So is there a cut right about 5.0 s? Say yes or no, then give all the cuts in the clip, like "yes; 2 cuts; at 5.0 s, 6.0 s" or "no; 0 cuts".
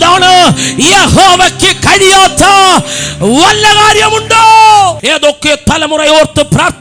yes; 1 cut; at 5.0 s